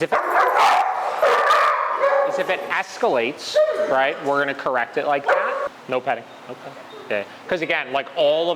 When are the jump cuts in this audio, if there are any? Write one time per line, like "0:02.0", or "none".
0:05.7